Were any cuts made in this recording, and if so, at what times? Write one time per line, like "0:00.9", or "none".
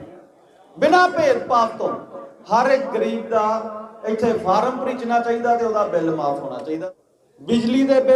0:06.8